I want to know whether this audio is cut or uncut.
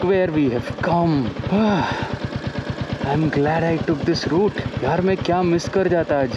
cut